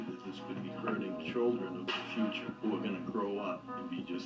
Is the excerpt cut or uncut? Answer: uncut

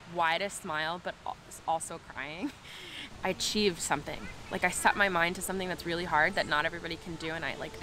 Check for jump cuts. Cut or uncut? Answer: cut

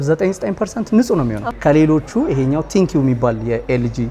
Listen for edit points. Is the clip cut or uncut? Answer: cut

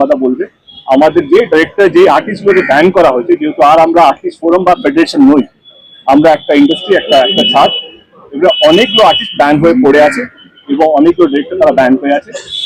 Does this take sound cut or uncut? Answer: uncut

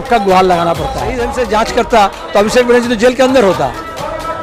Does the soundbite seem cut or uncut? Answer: cut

